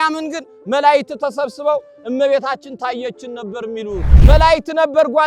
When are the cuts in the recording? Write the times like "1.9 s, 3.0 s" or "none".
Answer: 4.1 s